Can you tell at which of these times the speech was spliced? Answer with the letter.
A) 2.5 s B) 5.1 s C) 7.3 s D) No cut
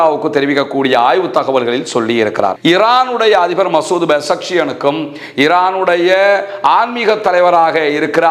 A